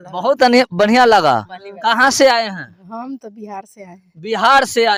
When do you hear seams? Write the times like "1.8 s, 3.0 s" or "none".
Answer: none

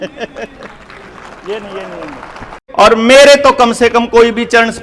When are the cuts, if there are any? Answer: 2.6 s

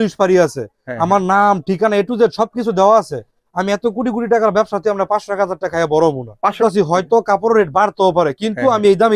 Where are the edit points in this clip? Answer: 6.6 s

